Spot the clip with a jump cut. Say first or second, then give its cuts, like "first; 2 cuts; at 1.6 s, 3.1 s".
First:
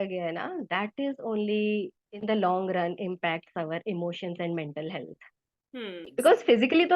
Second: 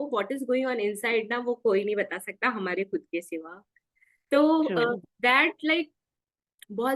first; 1 cut; at 6.0 s